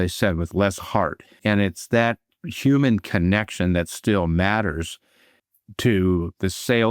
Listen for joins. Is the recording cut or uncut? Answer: cut